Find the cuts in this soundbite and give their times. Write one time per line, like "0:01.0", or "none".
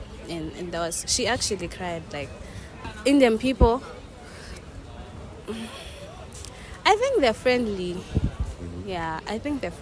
0:02.7